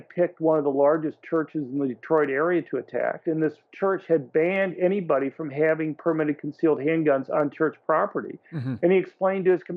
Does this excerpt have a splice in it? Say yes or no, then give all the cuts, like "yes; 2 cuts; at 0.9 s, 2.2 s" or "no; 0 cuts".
yes; 1 cut; at 3.2 s